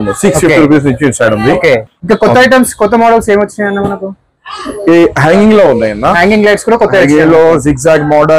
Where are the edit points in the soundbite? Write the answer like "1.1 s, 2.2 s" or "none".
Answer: none